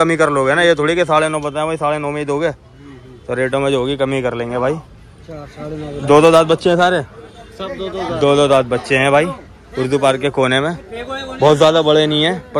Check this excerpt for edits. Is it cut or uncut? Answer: uncut